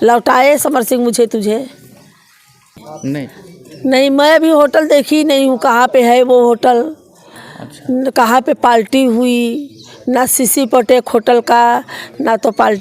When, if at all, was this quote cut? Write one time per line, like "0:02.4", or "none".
0:02.9